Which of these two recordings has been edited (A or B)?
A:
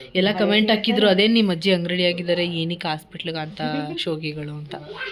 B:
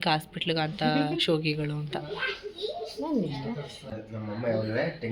B